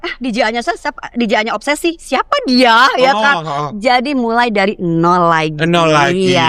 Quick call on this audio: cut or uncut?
uncut